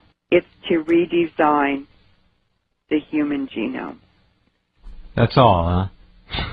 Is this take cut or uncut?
uncut